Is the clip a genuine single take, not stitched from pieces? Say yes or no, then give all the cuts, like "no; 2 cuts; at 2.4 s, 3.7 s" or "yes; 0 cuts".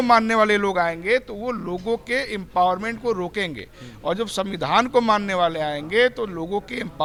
yes; 0 cuts